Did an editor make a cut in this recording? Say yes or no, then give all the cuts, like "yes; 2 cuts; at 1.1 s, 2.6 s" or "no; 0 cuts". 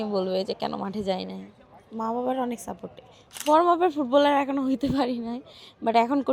yes; 1 cut; at 3.4 s